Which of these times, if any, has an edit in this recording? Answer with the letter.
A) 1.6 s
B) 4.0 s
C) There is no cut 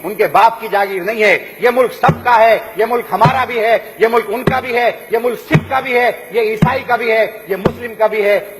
C